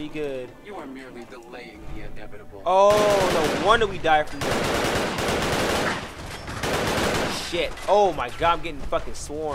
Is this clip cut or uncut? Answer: uncut